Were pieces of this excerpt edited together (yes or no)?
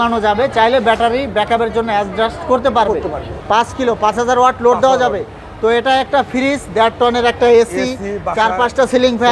yes